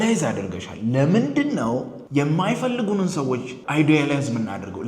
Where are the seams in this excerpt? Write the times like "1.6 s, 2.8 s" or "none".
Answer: 2.0 s, 3.6 s